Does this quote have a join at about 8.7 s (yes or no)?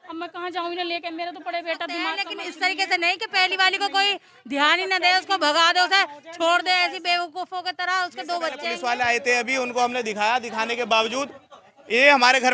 yes